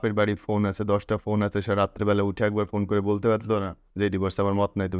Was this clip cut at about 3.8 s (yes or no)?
yes